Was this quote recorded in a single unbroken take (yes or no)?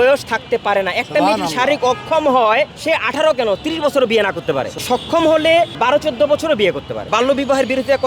no